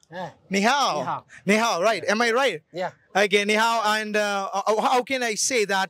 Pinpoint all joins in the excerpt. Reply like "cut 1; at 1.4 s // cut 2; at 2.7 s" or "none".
none